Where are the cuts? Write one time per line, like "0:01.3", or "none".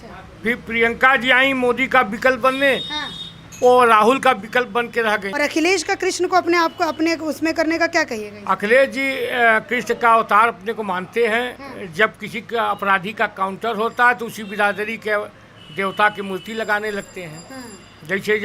0:05.3